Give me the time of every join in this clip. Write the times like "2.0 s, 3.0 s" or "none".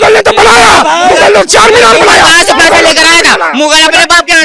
none